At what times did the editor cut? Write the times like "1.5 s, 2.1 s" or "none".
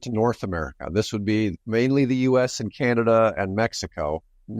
1.6 s